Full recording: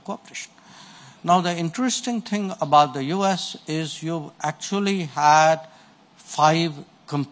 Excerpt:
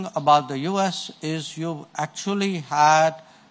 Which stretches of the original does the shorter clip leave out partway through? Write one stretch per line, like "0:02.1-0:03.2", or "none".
none

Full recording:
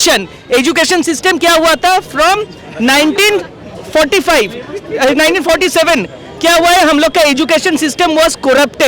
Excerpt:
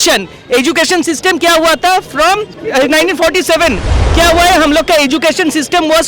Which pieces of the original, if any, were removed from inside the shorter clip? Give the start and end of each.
0:02.6-0:04.8

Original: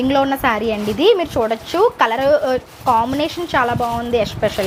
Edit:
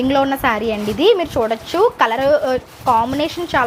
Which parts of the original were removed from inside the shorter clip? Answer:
none

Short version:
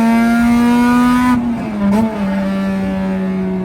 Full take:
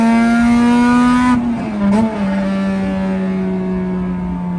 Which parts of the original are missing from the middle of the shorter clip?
none

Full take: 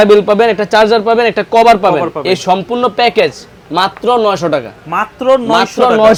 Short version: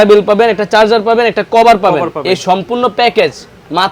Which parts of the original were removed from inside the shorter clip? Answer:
none

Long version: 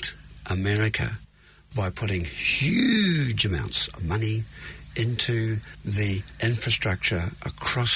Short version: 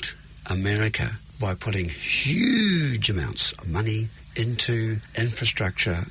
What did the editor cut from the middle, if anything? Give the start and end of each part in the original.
0:01.2-0:01.6
0:04.5-0:04.8
0:05.7-0:06.3

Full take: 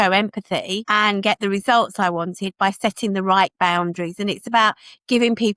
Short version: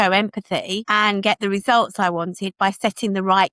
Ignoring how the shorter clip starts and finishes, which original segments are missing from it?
none

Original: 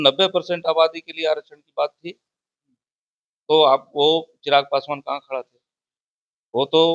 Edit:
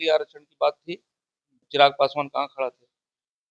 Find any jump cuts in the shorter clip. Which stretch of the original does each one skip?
0:02.8-0:04.3

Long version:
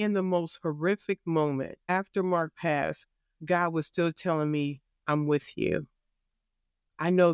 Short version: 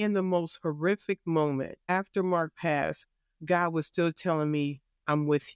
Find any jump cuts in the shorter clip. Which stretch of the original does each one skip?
none

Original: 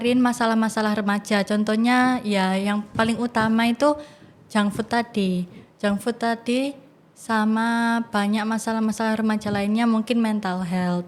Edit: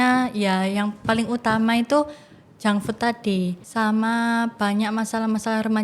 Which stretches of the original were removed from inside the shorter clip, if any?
0:05.5-0:07.2

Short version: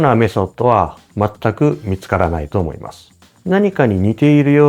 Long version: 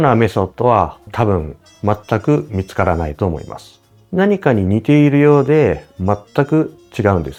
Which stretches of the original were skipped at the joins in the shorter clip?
0:01.0-0:01.7

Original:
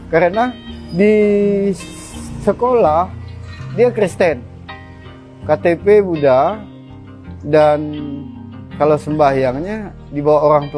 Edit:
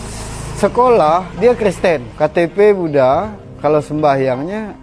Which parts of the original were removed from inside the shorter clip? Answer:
0:03.1-0:03.7
0:04.4-0:05.4
0:06.7-0:08.6

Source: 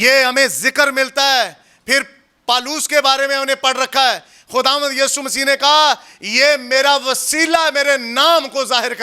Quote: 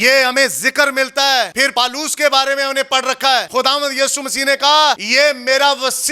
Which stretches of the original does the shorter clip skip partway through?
0:01.6-0:02.3
0:04.2-0:04.5
0:06.0-0:06.3

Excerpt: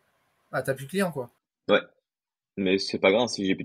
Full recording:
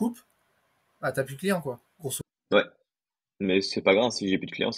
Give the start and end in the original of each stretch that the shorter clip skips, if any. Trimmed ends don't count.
0:01.9-0:02.3

